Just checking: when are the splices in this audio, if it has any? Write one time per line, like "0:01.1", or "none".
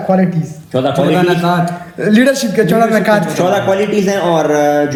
none